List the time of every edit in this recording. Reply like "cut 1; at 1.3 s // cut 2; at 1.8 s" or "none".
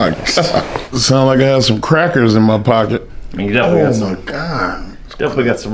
cut 1; at 0.9 s // cut 2; at 3.2 s